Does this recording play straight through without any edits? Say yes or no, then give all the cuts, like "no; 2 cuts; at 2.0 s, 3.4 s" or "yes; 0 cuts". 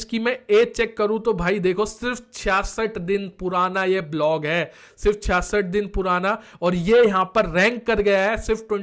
yes; 0 cuts